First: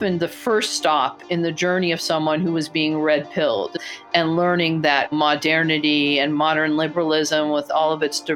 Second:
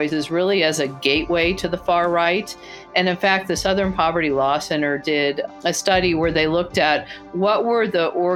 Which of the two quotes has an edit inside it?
first; 1 cut; at 3.8 s

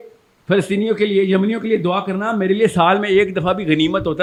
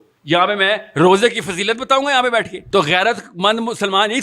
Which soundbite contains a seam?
second; 1 cut; at 2.6 s

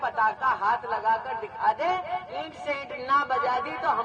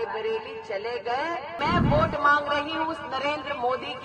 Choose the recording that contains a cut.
second; 1 cut; at 1.5 s

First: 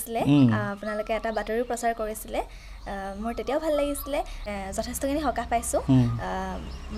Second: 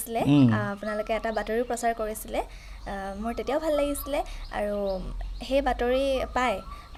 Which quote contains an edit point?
first; 1 cut; at 4.5 s

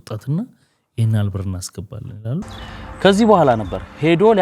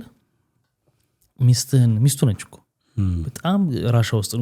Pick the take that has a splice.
first; 1 cut; at 2.4 s

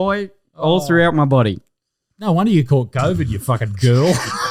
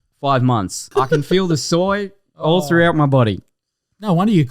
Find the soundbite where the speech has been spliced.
second; 1 cut; at 0.9 s

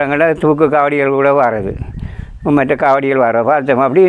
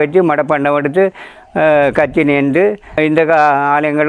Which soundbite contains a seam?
second; 1 cut; at 2.9 s

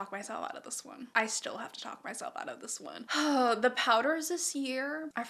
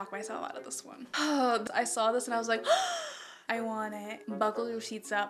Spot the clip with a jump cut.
second; 3 cuts; at 1.0 s, 1.6 s, 4.2 s

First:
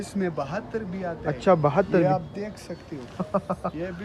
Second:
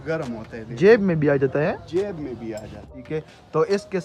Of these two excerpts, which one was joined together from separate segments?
second; 1 cut; at 2.9 s

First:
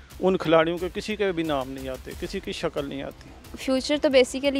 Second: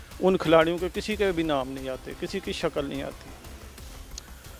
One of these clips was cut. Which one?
first; 1 cut; at 3.5 s

